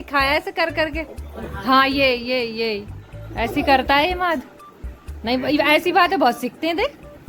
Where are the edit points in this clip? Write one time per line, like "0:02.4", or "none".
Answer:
none